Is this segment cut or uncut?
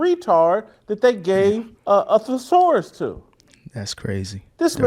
cut